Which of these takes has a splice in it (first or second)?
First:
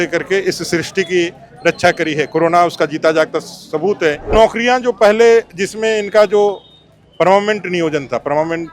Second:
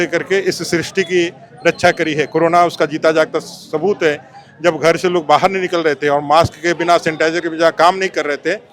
first